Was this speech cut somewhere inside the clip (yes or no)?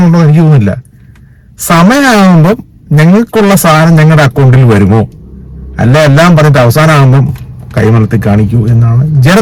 no